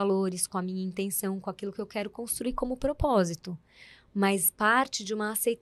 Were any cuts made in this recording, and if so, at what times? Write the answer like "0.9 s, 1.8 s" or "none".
none